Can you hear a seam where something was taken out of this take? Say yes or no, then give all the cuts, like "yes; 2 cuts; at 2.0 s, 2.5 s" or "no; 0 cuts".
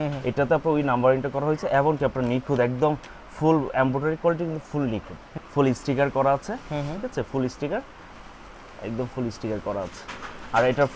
yes; 1 cut; at 5.4 s